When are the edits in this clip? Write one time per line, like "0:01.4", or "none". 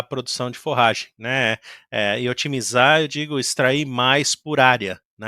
none

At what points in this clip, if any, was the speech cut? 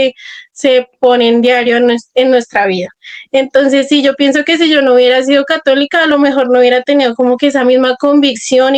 none

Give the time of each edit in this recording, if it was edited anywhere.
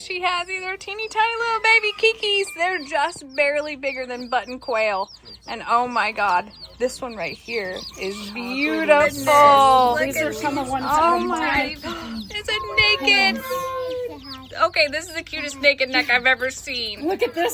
0:11.5

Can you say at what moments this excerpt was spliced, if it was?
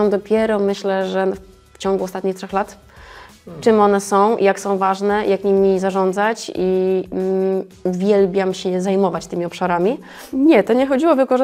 0:10.2

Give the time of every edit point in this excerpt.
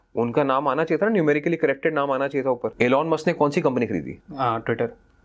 0:02.7
0:04.2

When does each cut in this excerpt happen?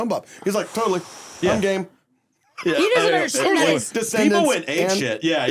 none

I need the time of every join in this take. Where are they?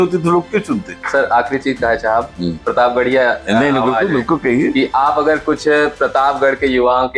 0:00.9

